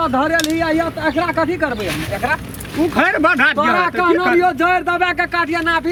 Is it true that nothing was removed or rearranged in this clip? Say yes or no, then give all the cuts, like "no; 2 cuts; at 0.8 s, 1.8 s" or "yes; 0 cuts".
yes; 0 cuts